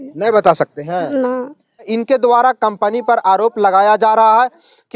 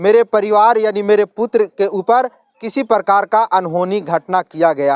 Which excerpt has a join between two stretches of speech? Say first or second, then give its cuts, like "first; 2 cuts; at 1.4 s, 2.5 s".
first; 1 cut; at 1.9 s